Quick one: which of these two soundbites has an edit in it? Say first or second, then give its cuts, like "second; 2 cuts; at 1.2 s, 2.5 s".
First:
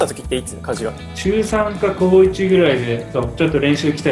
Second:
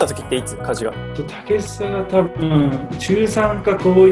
first; 1 cut; at 1.1 s